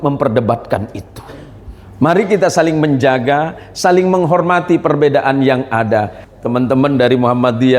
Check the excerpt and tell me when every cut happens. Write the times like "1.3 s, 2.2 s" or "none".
6.2 s